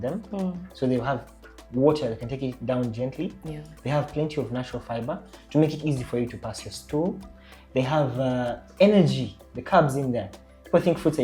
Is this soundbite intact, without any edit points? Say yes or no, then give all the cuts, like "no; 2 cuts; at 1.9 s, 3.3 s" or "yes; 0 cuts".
yes; 0 cuts